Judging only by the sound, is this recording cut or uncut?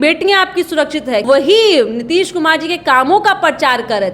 cut